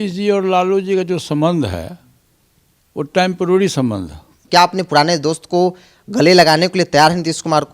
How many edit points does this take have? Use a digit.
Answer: 1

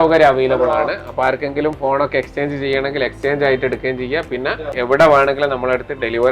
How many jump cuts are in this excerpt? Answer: 1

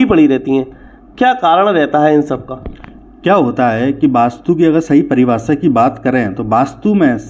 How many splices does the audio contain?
0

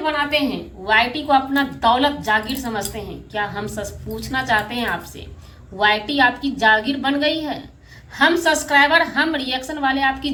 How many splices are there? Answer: 0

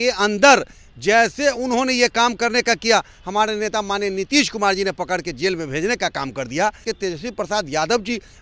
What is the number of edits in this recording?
1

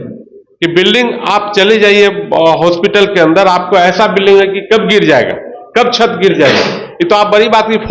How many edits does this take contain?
0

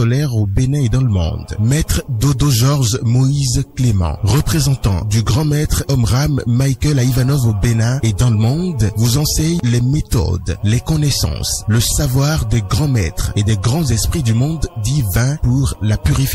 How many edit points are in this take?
1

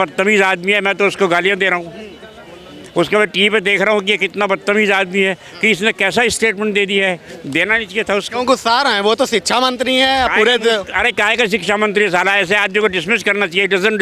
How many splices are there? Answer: 0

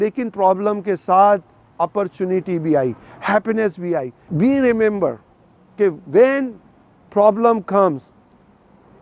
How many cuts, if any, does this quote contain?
0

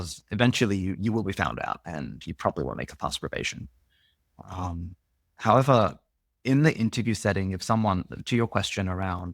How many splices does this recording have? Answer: 0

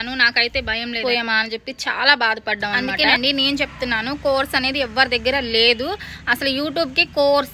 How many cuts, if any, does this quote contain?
1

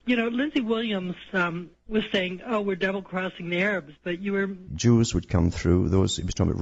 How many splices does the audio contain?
0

